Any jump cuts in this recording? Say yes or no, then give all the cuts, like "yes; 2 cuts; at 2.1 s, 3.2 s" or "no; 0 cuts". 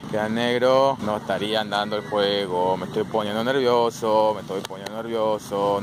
no; 0 cuts